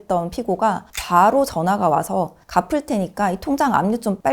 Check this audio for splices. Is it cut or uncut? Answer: uncut